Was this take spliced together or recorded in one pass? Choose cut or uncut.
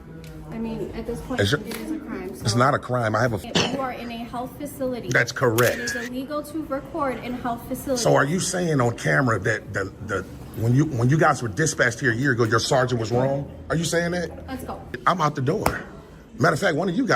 cut